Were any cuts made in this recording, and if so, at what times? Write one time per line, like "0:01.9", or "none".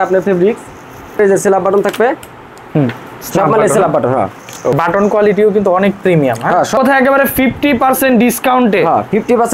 0:01.2
0:04.8
0:06.8